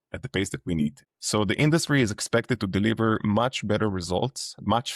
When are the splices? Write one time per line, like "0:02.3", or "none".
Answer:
0:01.0